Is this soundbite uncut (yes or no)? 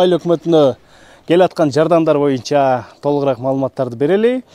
yes